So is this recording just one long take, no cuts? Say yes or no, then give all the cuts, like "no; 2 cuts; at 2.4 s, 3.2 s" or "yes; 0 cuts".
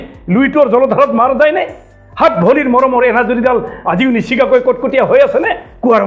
yes; 0 cuts